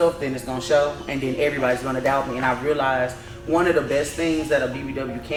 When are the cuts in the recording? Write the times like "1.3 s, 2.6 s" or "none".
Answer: none

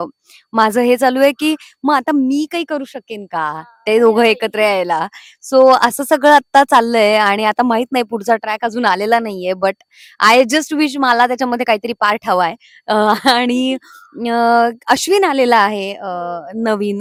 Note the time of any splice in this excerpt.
none

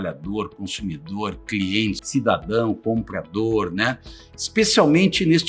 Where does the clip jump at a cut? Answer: 2.0 s

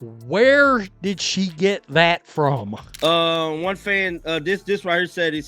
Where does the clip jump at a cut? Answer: 2.8 s

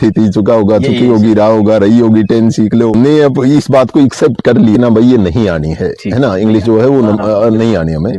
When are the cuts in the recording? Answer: 2.9 s, 4.8 s

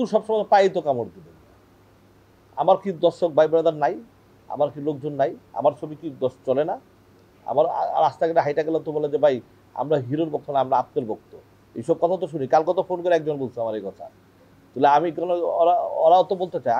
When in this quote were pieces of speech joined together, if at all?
none

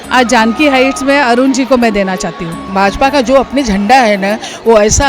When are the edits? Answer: 2.7 s

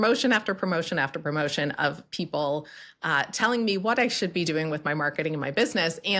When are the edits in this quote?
none

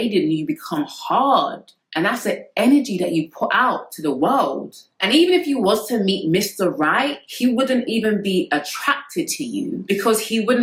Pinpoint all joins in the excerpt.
none

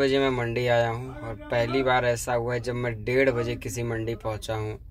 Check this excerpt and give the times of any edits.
none

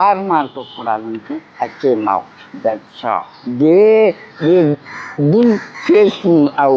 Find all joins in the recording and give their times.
1.5 s, 3.4 s, 4.3 s, 5.7 s

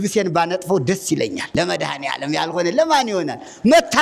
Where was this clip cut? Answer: 1.4 s

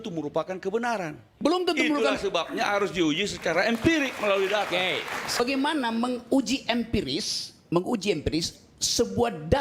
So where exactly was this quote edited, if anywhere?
5.4 s

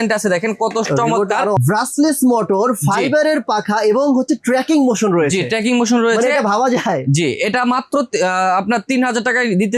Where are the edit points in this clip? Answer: 1.6 s

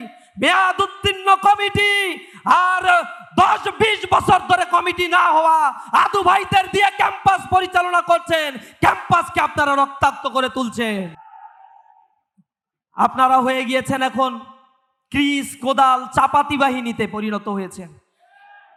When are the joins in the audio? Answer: none

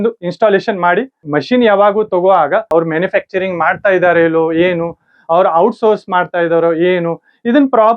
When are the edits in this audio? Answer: 1.2 s, 2.7 s

